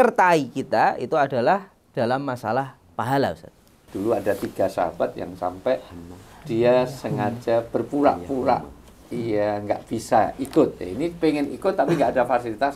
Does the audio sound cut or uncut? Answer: cut